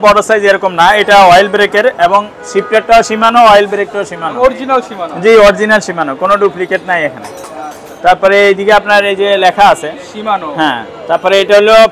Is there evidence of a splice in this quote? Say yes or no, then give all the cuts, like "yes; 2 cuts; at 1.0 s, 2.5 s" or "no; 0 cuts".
no; 0 cuts